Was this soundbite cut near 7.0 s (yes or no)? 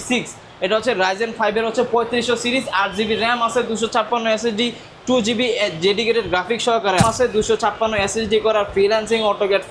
yes